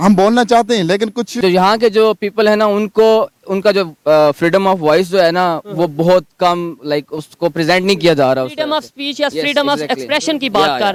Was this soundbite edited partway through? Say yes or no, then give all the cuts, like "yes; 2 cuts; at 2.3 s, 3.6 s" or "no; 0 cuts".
no; 0 cuts